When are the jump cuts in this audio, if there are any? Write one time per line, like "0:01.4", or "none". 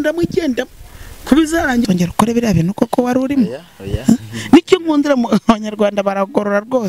0:01.8